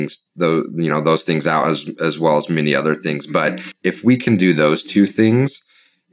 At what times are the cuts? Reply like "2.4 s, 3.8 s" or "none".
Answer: 3.8 s